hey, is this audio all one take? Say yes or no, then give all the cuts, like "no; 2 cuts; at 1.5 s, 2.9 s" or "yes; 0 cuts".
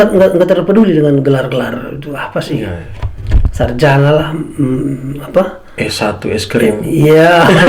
yes; 0 cuts